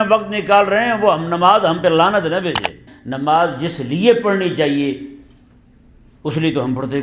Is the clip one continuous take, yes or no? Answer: no